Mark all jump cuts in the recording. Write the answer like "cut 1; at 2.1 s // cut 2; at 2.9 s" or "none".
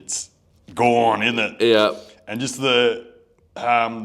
none